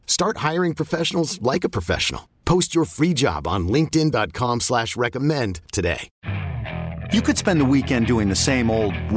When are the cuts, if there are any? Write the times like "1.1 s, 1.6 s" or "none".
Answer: 6.2 s